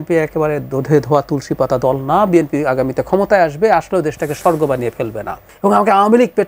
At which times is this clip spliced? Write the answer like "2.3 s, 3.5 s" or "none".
5.5 s